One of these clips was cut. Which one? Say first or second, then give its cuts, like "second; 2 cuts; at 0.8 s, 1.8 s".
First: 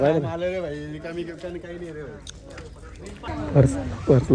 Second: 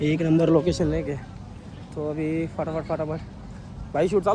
first; 1 cut; at 3.3 s